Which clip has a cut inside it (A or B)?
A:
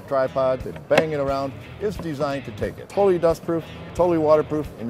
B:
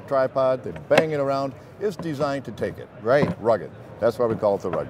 A